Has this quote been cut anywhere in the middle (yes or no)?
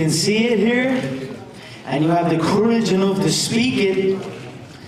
no